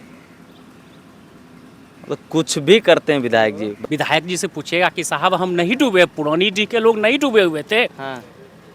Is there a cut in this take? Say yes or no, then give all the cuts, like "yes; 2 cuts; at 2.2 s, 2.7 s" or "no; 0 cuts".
yes; 1 cut; at 3.8 s